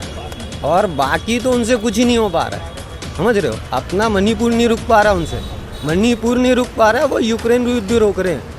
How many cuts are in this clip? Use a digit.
0